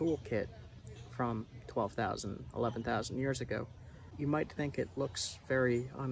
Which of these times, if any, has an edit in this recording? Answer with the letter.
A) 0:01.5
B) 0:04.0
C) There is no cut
B